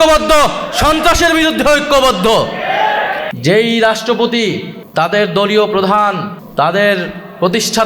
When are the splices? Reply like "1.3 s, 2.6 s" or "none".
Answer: 3.3 s, 4.7 s, 6.4 s